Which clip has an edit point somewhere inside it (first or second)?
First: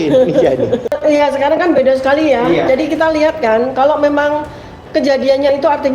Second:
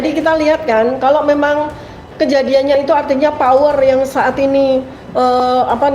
first